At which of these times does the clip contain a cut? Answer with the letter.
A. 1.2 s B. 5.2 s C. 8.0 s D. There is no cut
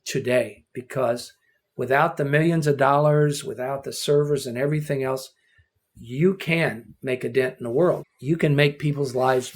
C